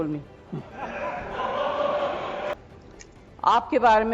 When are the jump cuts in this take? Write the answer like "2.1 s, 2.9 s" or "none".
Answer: 2.5 s